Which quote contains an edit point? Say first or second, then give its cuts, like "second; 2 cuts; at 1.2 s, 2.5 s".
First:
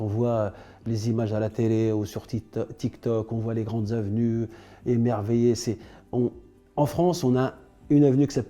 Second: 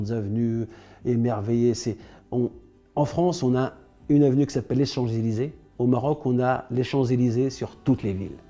second; 1 cut; at 5.6 s